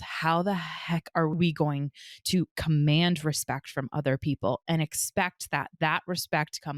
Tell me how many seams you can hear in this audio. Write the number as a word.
one